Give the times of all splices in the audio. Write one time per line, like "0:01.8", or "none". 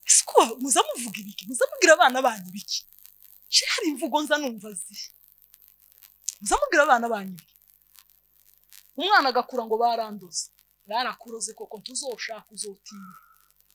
none